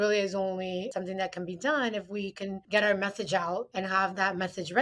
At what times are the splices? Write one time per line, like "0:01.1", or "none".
0:00.9
0:03.7